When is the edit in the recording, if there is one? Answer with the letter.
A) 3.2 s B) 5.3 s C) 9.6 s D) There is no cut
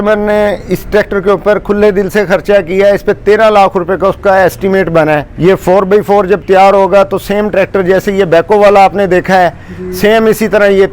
B